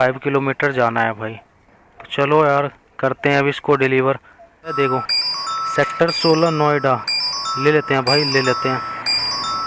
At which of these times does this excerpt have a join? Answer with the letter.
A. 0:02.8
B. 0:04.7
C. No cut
B